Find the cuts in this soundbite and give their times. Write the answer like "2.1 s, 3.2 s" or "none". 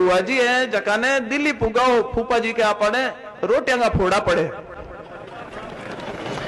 none